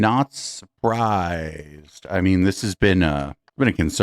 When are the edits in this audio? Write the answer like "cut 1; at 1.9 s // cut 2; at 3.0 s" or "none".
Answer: none